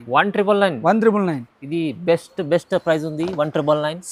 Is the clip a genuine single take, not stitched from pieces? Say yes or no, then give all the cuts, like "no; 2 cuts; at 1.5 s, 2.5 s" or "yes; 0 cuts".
yes; 0 cuts